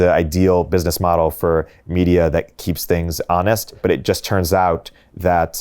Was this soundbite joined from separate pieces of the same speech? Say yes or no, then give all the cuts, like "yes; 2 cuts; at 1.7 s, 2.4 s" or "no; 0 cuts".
yes; 2 cuts; at 2.7 s, 3.8 s